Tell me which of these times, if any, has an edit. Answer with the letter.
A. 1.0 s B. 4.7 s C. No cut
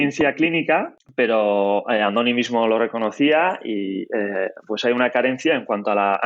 A